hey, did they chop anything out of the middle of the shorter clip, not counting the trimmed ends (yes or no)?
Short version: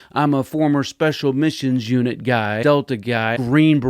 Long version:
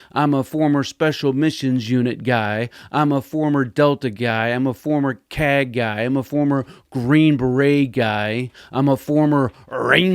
yes